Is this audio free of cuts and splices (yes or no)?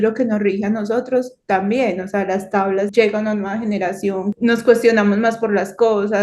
no